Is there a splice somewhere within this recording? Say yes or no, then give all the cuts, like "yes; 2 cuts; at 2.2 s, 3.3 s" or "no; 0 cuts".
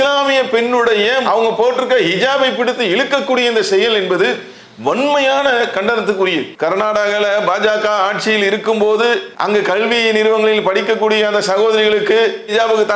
yes; 2 cuts; at 4.5 s, 6.5 s